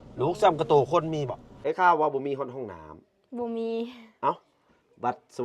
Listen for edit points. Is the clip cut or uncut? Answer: cut